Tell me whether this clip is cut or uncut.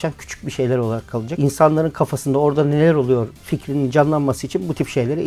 uncut